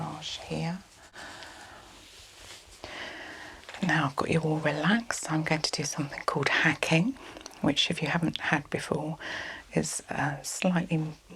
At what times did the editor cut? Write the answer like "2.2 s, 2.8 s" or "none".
2.7 s